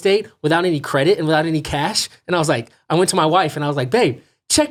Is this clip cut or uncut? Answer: uncut